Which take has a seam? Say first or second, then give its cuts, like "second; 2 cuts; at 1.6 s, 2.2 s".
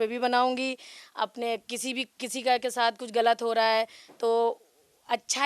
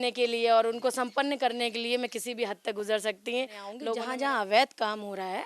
second; 1 cut; at 3.9 s